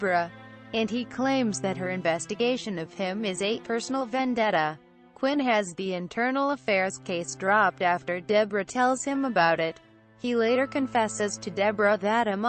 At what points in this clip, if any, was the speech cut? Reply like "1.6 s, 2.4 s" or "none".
none